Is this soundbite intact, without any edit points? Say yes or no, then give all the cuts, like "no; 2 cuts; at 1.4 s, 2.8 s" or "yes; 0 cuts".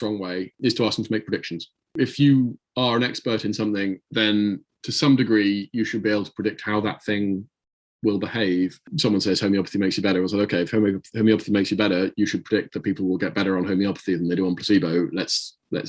no; 2 cuts; at 4.0 s, 8.8 s